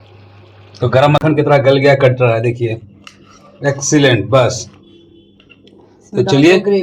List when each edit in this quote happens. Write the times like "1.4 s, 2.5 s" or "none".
1.2 s